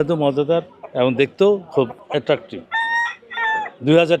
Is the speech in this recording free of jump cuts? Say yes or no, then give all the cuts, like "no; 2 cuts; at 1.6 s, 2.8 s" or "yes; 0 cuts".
no; 1 cut; at 2.6 s